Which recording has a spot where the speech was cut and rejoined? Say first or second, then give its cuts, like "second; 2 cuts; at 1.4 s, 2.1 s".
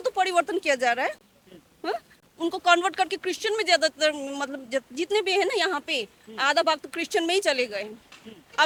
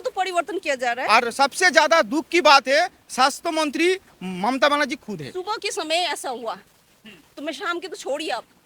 second; 2 cuts; at 1.0 s, 5.3 s